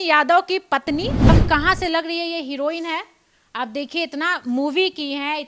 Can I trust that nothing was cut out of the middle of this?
no; 1 cut; at 1.3 s

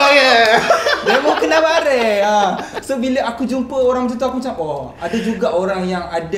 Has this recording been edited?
no; 0 cuts

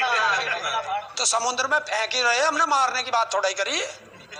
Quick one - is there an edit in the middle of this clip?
yes; 1 cut; at 1.1 s

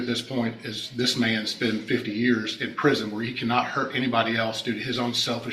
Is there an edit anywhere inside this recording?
no; 0 cuts

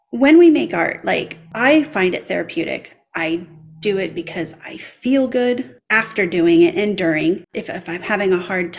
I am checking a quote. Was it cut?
yes; 2 cuts; at 1.4 s, 7.6 s

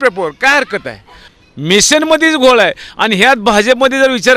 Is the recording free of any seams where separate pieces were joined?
no; 1 cut; at 1.1 s

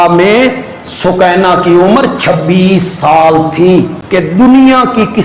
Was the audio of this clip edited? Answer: yes; 1 cut; at 4.0 s

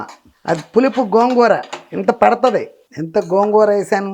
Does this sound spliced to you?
yes; 1 cut; at 2.8 s

